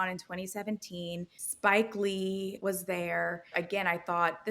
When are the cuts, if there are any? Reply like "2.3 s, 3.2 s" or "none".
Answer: 1.4 s, 2.6 s, 3.5 s